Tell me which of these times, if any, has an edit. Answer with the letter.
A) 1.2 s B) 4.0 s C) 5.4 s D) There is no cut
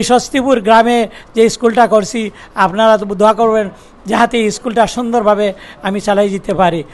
D